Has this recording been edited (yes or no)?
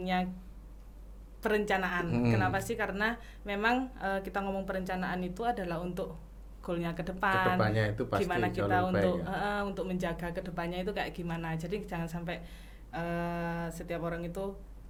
no